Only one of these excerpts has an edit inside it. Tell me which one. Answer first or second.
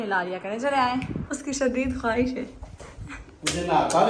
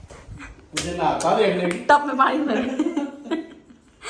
first